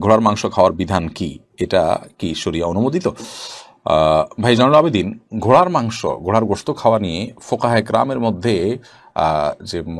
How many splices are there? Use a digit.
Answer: 0